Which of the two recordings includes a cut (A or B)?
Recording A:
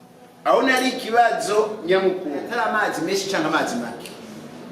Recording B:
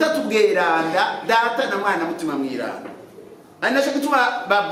A